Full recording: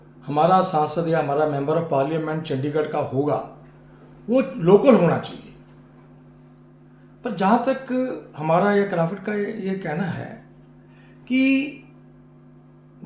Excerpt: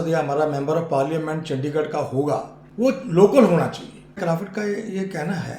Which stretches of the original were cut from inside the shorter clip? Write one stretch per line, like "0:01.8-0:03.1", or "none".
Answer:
0:03.6-0:04.1
0:05.7-0:08.9